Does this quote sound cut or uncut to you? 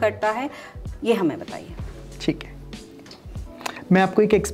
uncut